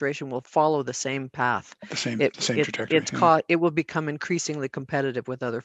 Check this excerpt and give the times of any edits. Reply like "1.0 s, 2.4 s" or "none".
none